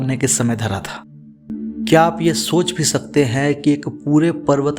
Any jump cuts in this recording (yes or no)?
yes